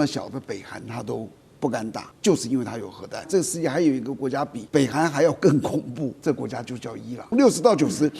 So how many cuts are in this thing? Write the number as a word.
five